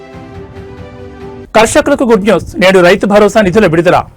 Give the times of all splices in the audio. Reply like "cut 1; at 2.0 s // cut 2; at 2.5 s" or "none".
cut 1; at 1.4 s